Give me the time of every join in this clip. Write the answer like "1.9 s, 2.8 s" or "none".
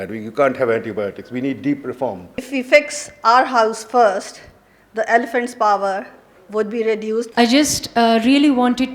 2.4 s, 7.3 s